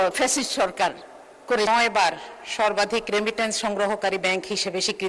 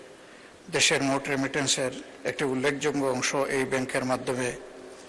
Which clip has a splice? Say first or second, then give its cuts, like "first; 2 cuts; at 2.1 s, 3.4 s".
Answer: first; 1 cut; at 1.7 s